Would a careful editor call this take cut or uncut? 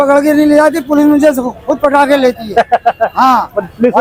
uncut